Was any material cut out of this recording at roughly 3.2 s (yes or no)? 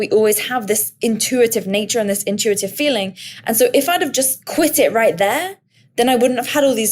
no